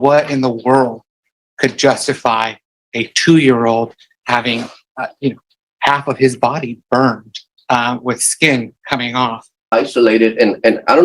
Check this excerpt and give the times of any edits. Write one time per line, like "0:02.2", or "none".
0:04.8
0:09.6